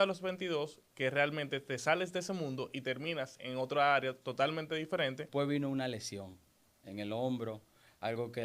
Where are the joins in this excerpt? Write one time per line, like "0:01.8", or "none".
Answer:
0:05.3